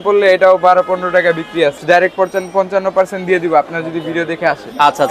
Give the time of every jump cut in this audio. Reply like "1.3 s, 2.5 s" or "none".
1.8 s